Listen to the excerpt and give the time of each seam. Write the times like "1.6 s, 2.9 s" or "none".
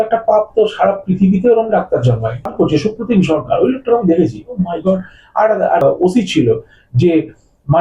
2.5 s, 5.8 s